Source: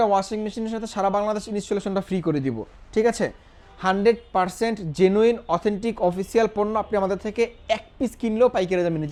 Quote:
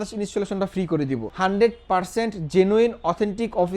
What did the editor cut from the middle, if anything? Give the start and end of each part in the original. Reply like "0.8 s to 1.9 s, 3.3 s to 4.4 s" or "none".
2.6 s to 3.7 s